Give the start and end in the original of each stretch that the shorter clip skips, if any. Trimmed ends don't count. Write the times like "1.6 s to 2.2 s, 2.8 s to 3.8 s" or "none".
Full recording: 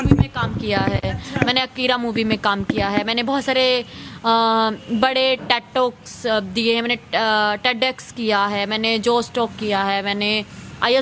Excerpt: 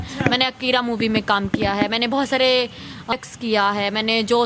4.3 s to 7.9 s

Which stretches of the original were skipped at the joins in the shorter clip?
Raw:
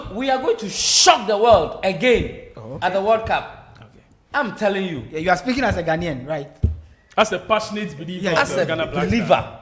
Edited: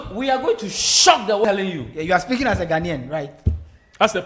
1.5 s to 4.6 s

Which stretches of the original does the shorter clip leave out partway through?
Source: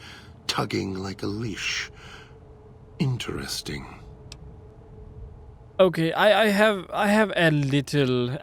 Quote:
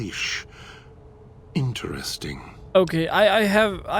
4.0 s to 5.6 s

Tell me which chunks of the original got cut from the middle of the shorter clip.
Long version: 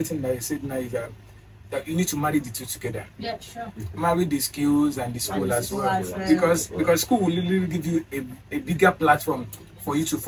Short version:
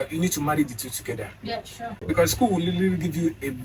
3.7 s to 6.7 s

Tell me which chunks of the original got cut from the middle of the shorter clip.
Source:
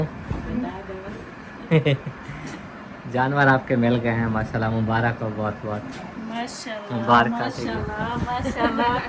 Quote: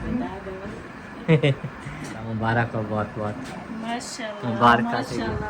2.7 s to 4.7 s

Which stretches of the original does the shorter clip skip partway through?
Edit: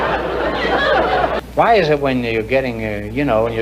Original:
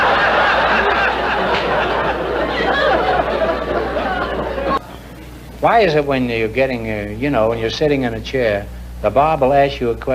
3.3 s to 5.4 s

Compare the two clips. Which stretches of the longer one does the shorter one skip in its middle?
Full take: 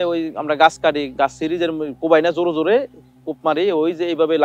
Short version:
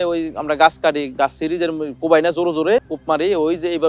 2.9 s to 3.3 s

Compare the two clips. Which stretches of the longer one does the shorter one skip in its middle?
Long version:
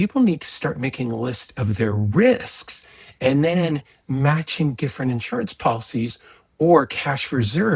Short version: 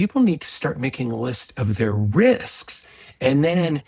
none

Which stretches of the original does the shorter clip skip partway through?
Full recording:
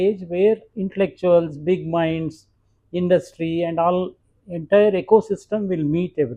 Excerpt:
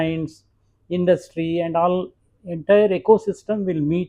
none

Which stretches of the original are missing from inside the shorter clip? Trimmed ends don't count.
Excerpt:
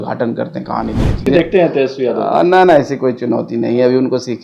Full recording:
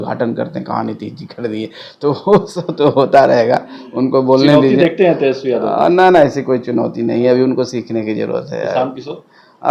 1.3 s to 4.7 s

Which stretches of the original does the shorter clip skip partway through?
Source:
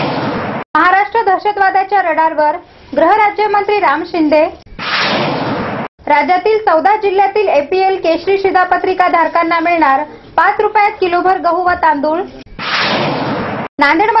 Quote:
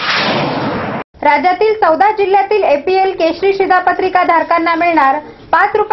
none

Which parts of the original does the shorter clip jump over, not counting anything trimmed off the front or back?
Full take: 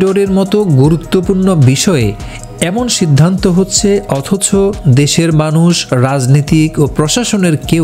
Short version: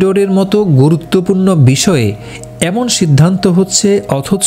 none

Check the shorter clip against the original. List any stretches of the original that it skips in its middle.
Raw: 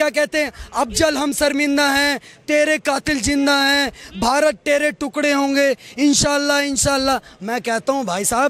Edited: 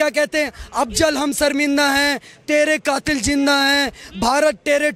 none

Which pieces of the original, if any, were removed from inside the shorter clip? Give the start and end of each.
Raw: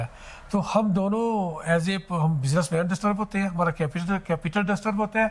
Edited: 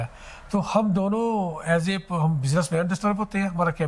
none

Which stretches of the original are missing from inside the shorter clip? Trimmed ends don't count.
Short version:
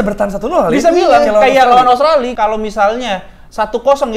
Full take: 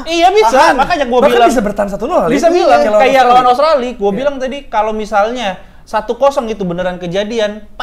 3.9 s to 4.7 s

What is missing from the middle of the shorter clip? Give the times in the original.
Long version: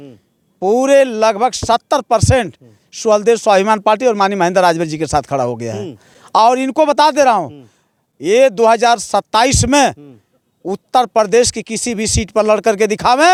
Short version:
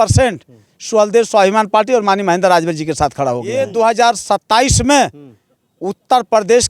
5.7 s to 8.4 s

